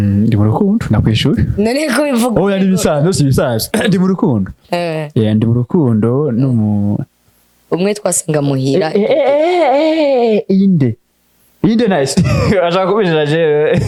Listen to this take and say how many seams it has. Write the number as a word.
zero